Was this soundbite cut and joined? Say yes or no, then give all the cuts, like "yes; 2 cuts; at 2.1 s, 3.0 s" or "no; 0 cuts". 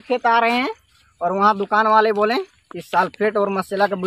no; 0 cuts